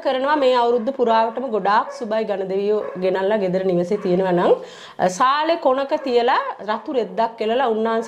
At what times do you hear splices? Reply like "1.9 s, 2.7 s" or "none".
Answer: none